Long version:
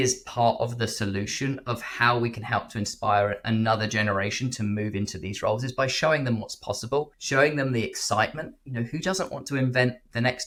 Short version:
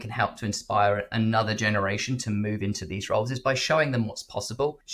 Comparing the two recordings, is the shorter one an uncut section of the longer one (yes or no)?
yes